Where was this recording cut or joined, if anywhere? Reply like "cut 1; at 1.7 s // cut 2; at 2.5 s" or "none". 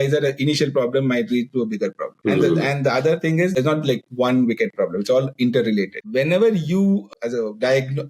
cut 1; at 2.1 s // cut 2; at 3.6 s // cut 3; at 6.0 s